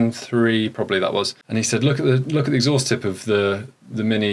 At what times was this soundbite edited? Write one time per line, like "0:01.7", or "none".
0:01.4